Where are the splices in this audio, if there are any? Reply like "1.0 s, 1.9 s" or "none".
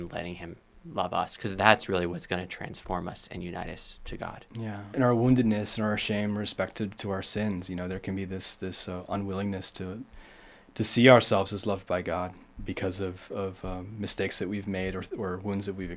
4.9 s